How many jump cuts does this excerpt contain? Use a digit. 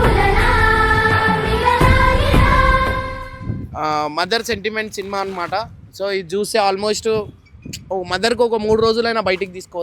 1